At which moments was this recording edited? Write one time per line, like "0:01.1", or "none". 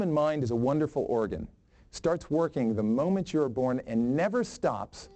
none